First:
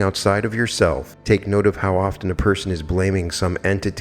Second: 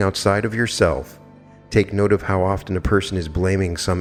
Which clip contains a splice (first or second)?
first